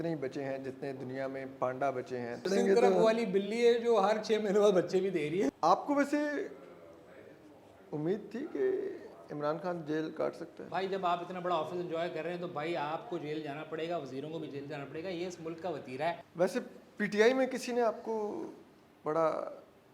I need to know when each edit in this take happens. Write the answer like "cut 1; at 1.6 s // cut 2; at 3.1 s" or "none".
cut 1; at 2.5 s // cut 2; at 5.5 s // cut 3; at 10.6 s // cut 4; at 16.3 s